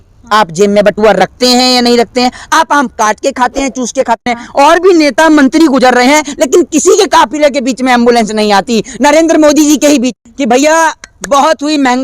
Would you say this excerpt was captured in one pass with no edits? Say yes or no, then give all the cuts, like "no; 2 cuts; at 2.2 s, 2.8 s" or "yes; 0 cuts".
no; 2 cuts; at 4.3 s, 10.1 s